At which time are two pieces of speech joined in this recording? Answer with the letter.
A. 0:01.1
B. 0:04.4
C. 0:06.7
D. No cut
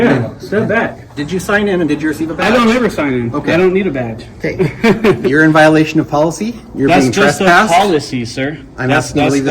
A